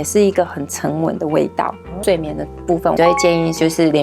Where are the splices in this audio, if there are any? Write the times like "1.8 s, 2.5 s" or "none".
1.9 s, 3.0 s